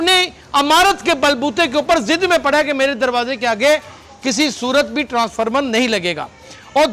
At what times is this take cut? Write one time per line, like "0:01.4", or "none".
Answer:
none